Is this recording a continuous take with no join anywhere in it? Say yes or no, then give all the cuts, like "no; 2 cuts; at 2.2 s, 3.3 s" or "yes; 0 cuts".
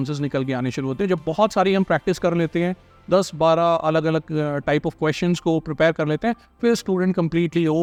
yes; 0 cuts